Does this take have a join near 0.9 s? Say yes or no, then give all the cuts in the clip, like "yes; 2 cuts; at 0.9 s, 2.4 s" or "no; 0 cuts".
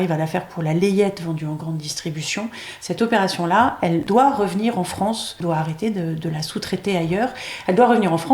no; 2 cuts; at 4.0 s, 5.4 s